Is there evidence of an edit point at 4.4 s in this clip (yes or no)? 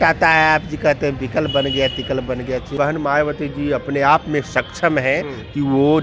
no